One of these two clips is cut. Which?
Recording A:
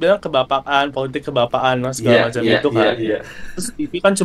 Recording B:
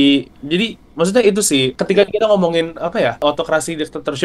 B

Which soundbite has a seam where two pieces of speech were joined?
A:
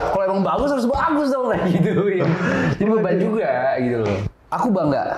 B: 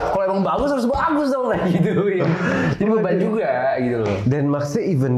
A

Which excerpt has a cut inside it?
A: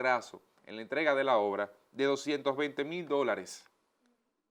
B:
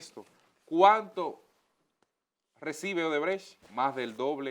B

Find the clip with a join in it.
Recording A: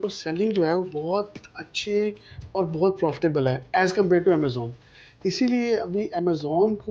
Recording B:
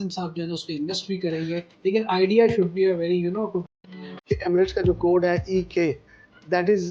B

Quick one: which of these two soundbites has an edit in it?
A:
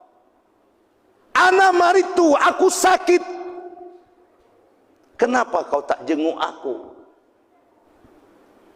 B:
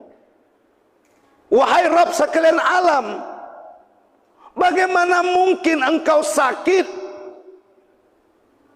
A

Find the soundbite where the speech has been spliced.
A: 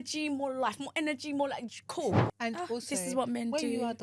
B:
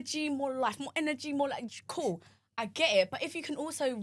A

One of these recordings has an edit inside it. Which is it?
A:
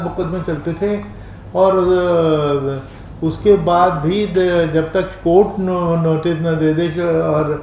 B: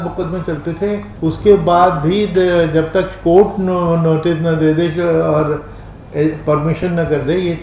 B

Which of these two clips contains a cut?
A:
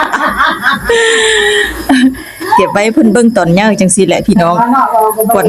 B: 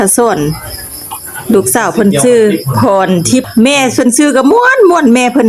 B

